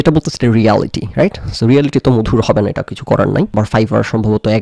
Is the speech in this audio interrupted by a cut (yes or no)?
yes